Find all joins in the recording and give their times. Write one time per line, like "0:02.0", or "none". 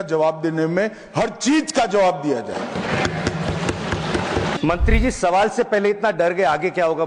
0:04.6